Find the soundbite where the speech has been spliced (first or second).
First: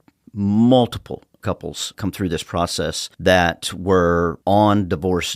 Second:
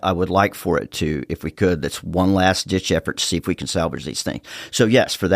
first